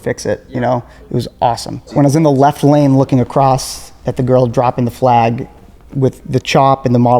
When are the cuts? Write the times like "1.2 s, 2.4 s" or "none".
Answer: 1.9 s